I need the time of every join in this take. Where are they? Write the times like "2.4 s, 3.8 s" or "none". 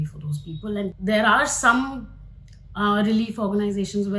1.0 s